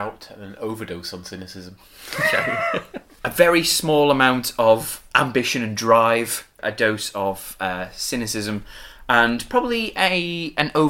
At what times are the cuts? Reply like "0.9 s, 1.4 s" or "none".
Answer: 3.0 s, 5.0 s, 6.6 s